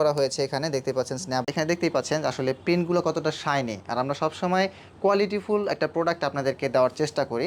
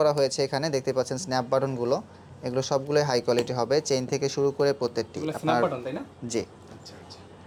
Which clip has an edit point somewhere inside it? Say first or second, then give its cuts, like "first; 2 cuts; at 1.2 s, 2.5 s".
first; 1 cut; at 1.5 s